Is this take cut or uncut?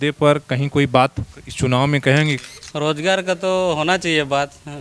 cut